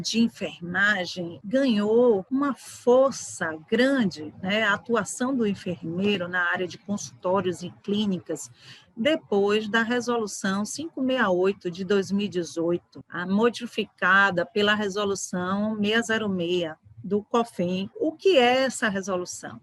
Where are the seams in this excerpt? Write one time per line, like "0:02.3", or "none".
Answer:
none